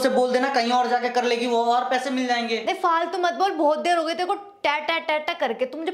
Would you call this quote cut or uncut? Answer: uncut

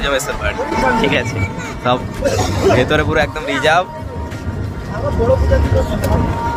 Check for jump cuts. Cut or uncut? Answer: uncut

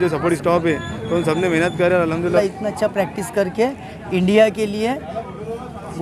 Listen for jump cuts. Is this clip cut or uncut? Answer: cut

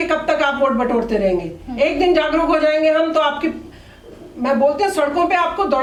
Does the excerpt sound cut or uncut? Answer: uncut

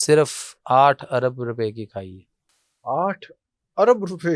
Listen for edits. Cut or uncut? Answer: uncut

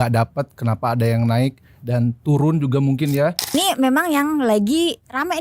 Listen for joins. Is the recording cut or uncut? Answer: cut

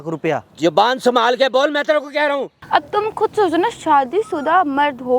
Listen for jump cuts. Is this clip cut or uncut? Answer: cut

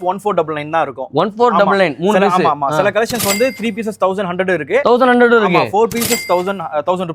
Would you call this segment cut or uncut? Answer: uncut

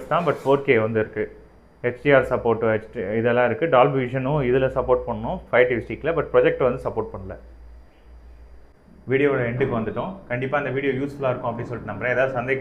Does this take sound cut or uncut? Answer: uncut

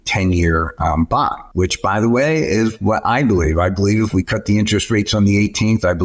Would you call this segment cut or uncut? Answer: uncut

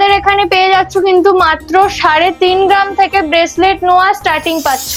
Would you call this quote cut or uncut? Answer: uncut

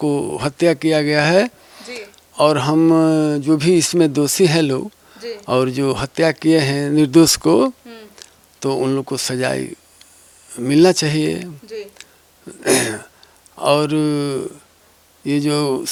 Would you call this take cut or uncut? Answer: uncut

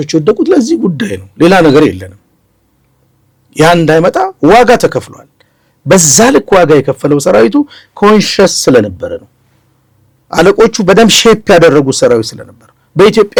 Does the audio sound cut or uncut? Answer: uncut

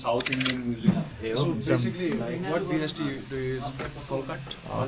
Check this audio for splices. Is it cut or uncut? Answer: cut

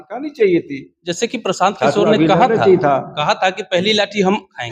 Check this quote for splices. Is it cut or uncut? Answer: uncut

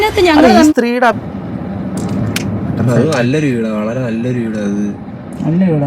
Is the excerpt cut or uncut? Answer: cut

